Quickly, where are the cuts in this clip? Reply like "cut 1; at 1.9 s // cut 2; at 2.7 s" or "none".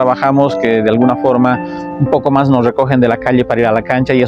none